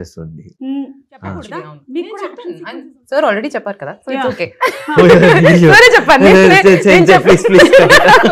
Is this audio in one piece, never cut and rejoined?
no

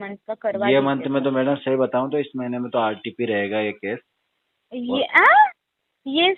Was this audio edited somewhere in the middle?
no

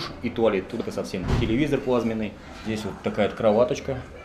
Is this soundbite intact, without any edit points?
no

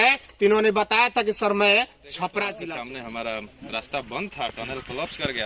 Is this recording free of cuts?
no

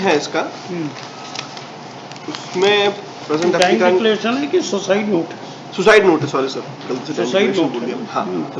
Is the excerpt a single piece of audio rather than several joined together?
yes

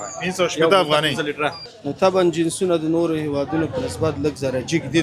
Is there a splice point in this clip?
yes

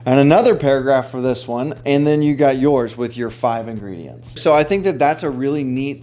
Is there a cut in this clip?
yes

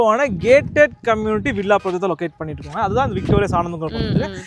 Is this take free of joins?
yes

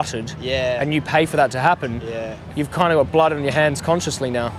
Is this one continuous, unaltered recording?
no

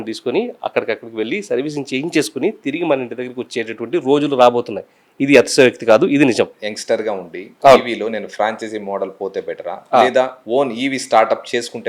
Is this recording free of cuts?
no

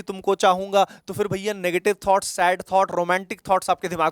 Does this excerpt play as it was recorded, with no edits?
yes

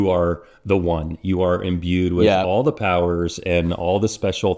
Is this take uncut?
yes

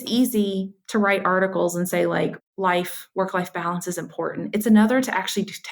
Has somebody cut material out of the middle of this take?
no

